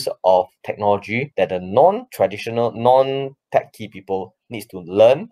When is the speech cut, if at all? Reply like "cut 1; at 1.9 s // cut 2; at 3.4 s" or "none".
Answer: none